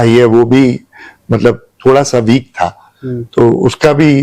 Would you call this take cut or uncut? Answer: uncut